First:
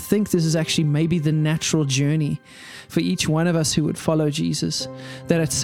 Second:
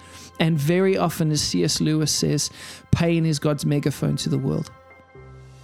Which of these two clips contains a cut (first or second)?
second